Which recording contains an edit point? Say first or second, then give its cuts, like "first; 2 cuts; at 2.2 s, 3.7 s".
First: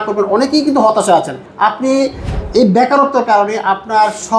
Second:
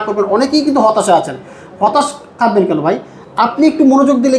first; 1 cut; at 1.4 s